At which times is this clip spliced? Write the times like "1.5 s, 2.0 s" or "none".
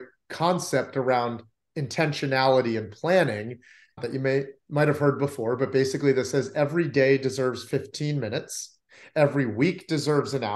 4.0 s